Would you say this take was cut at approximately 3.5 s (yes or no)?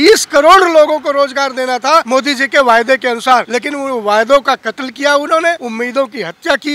yes